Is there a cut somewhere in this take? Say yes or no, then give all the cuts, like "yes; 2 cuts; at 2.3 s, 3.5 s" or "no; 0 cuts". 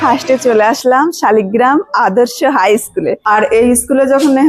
yes; 1 cut; at 3.2 s